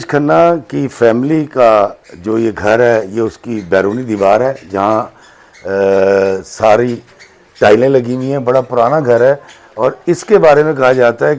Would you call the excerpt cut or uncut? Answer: uncut